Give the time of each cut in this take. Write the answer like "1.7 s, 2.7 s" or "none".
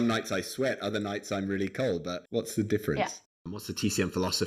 2.2 s, 3.3 s